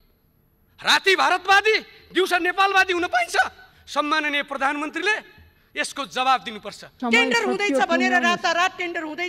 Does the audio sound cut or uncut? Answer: cut